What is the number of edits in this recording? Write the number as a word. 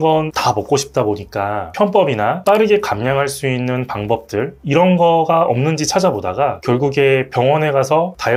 zero